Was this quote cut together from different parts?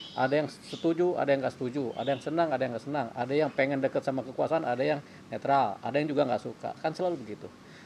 no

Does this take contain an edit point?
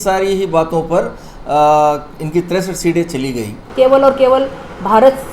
yes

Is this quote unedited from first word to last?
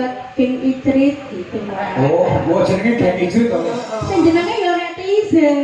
yes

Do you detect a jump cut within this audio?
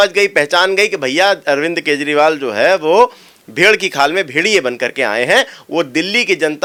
no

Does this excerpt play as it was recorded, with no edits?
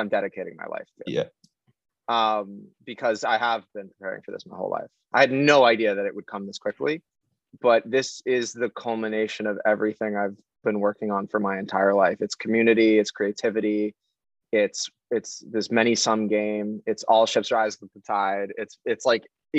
yes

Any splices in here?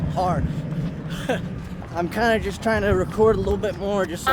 yes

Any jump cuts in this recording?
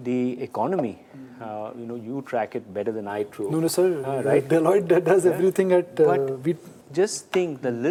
no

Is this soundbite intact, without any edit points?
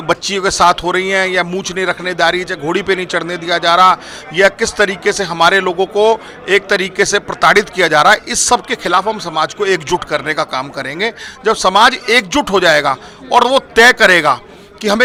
yes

